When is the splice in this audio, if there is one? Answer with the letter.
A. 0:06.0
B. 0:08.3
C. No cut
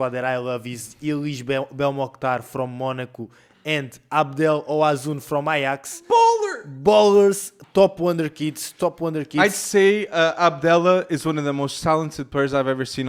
C